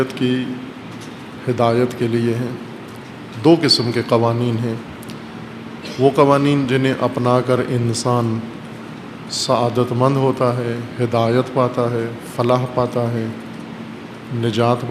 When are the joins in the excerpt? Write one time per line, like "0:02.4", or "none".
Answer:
0:04.0